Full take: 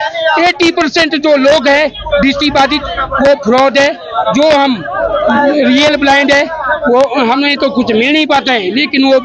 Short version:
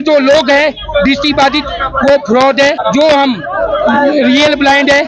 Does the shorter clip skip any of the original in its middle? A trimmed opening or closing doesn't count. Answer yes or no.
yes